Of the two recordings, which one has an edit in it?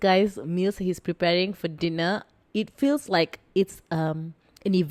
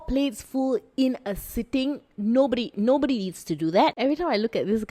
second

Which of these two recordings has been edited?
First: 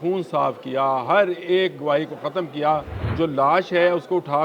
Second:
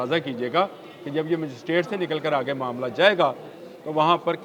first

